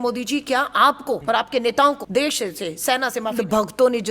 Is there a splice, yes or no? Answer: yes